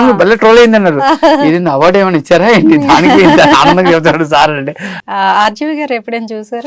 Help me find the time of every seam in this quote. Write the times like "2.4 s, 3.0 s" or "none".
4.8 s